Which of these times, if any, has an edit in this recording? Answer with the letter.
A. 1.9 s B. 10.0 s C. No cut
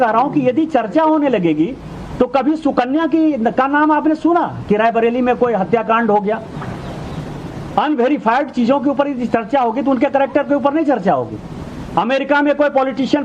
B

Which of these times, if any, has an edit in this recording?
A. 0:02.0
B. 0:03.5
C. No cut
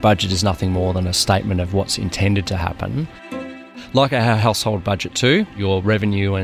B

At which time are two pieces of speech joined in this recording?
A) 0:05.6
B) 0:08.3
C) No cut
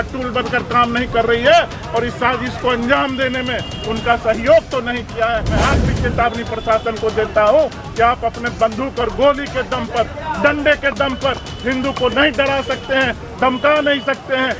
A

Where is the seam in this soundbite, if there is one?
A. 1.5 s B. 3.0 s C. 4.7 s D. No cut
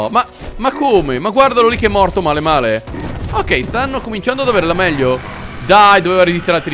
D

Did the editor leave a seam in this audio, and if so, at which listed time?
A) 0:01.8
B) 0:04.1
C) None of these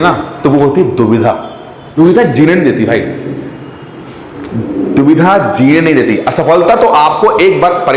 A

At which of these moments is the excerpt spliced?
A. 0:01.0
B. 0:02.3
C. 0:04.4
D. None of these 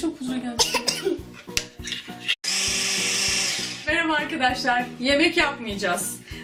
D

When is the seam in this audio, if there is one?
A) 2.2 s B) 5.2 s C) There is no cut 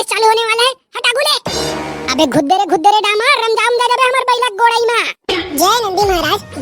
B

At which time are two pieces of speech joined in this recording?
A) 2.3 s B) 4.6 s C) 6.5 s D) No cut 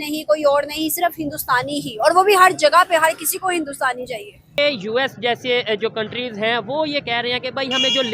B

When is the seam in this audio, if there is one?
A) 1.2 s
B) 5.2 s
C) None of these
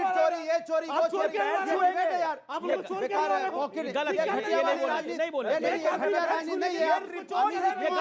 C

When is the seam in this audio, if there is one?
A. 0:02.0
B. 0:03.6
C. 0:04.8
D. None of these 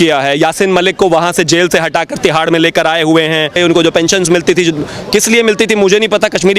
B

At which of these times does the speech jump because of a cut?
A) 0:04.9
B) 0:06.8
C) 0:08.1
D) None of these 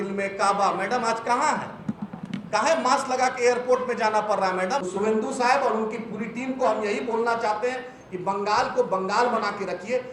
A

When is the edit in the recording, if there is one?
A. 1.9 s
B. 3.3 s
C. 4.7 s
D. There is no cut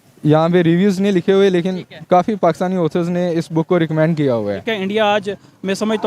C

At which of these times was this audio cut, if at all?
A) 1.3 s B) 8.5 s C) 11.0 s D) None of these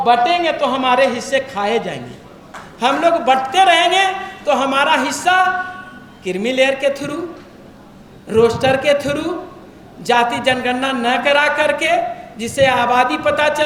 D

